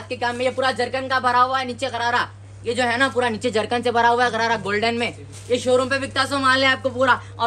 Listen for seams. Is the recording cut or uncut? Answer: uncut